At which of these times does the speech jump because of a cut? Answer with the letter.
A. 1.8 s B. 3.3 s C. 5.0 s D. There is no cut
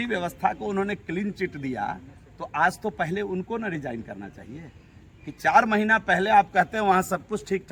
D